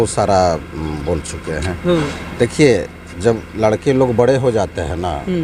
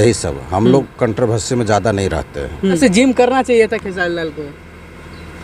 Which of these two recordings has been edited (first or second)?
second